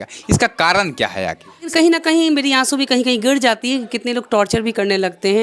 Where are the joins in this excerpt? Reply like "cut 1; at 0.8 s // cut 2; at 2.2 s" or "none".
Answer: cut 1; at 1.7 s